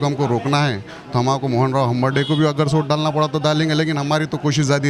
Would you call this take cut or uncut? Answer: uncut